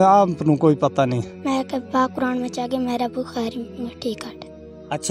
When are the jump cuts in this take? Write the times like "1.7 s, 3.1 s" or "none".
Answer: 1.3 s